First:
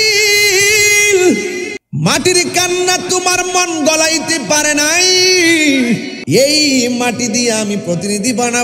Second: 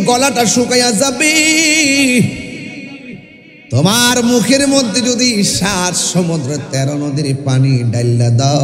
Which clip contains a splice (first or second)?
first